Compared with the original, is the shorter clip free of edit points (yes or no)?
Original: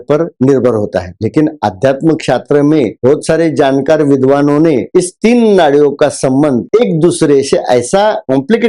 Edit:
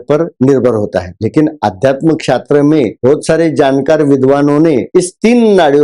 yes